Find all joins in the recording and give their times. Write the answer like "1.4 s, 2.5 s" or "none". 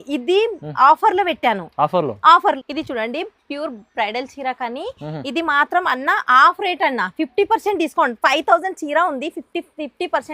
2.6 s